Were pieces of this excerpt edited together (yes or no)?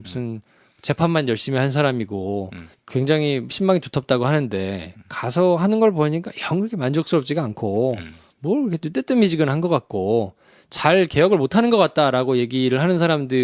yes